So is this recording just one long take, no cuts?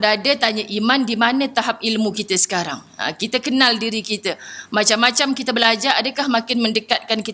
yes; 0 cuts

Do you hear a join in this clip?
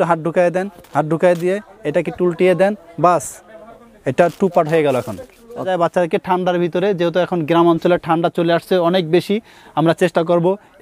yes; 1 cut; at 5.7 s

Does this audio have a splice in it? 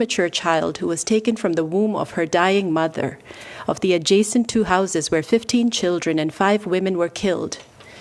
no; 0 cuts

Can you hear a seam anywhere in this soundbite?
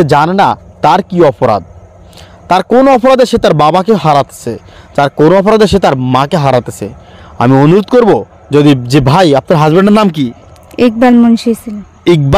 no; 0 cuts

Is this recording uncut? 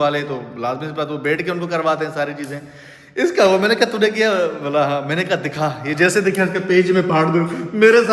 yes; 0 cuts

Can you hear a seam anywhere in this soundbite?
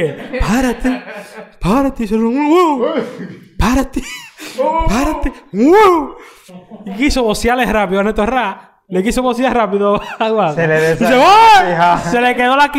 no; 0 cuts

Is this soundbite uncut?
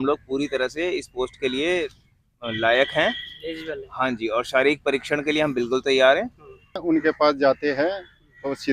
no; 1 cut; at 6.8 s

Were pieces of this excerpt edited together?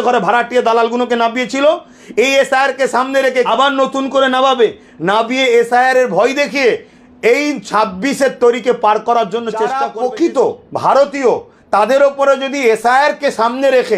yes; 2 cuts; at 3.5 s, 9.7 s

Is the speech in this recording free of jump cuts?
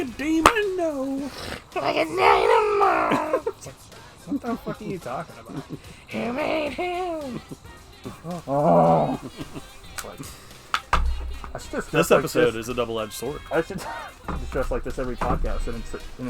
no; 1 cut; at 8.0 s

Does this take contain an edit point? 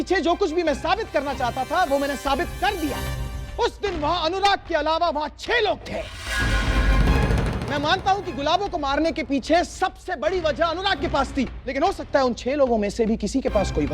no; 0 cuts

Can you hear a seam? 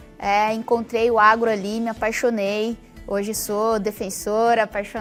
no; 0 cuts

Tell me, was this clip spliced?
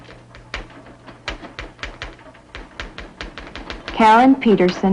yes; 1 cut; at 2.9 s

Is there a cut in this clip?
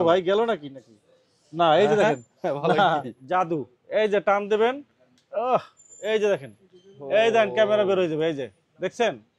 yes; 1 cut; at 3.2 s

